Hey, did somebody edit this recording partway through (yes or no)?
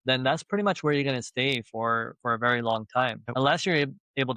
yes